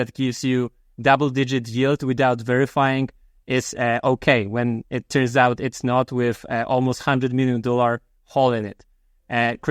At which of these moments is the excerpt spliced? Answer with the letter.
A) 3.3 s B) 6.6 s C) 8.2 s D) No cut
D